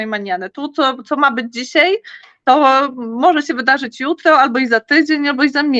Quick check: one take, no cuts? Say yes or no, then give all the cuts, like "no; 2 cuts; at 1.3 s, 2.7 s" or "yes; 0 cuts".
yes; 0 cuts